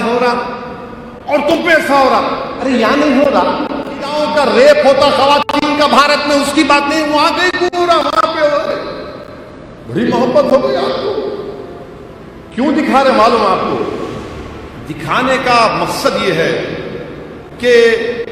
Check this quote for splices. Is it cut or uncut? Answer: cut